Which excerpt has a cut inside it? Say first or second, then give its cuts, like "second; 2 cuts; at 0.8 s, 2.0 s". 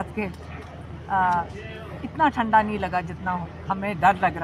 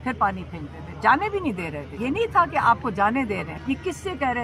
second; 2 cuts; at 1.8 s, 3.5 s